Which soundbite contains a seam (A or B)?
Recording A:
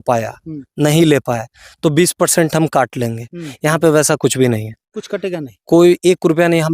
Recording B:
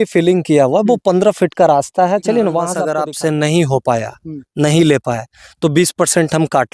B